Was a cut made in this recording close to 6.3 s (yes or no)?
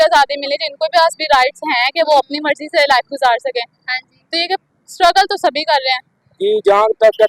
yes